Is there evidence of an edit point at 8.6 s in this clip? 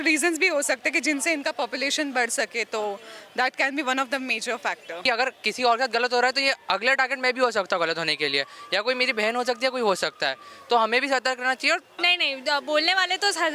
no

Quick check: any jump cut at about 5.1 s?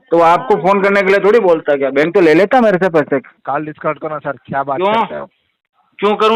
no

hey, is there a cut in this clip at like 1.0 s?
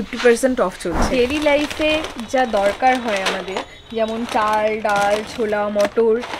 yes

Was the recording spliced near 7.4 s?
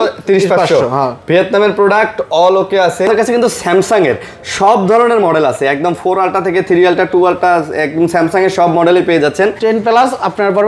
no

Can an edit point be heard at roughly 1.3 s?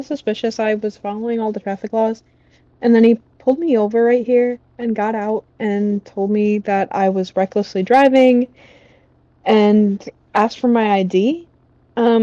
no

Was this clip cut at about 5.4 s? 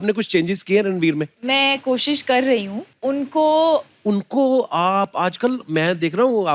no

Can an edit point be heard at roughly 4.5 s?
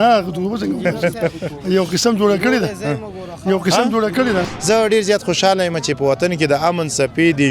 yes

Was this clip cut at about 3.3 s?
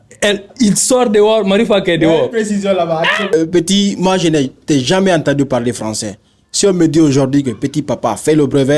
yes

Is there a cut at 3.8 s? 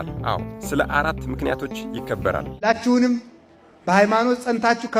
no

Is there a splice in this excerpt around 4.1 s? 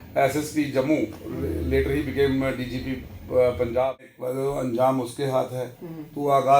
yes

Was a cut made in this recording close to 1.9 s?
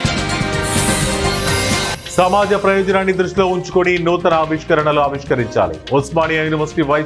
yes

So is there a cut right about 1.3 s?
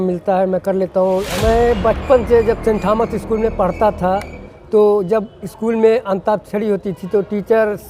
yes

